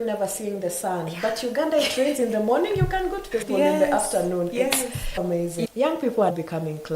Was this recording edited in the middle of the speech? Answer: yes; 1 cut; at 5.6 s

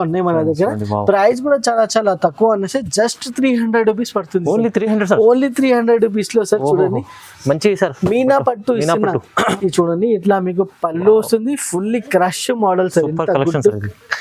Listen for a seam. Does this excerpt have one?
yes; 1 cut; at 9.5 s

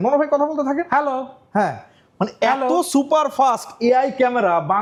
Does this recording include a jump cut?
no; 0 cuts

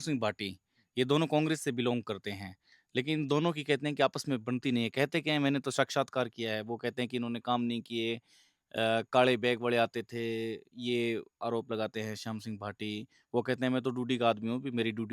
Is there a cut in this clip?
no; 0 cuts

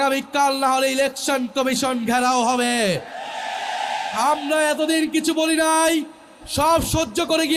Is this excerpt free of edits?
yes; 0 cuts

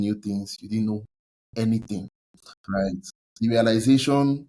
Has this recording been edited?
no; 0 cuts

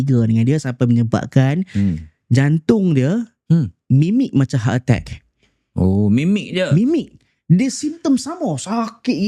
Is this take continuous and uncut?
yes; 0 cuts

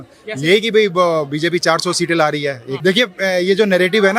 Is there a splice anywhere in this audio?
yes; 1 cut; at 2.8 s

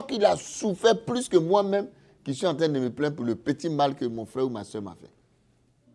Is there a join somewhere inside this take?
no; 0 cuts

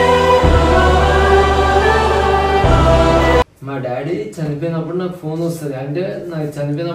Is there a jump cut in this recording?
no; 0 cuts

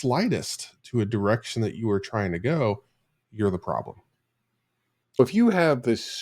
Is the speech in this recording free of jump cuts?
no; 1 cut; at 5.2 s

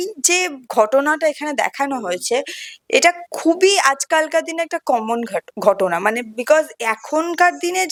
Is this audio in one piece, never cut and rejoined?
yes; 0 cuts

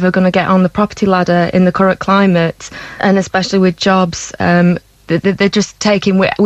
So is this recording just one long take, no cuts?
no; 2 cuts; at 3.0 s, 4.9 s

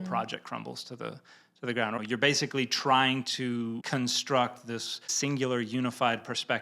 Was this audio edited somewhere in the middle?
yes; 2 cuts; at 2.0 s, 5.1 s

